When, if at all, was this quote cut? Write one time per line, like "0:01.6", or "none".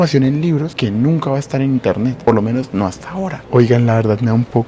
0:03.4